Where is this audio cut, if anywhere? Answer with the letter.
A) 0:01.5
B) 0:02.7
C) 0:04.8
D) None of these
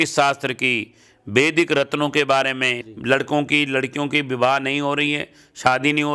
B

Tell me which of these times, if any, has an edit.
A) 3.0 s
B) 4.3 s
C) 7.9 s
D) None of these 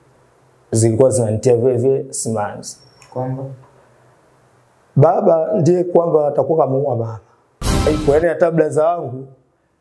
C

